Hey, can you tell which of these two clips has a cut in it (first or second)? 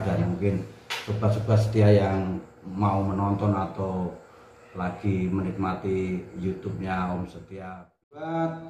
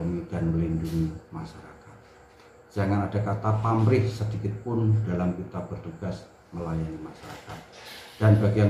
first